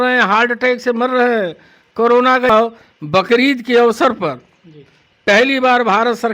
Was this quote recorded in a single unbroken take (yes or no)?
no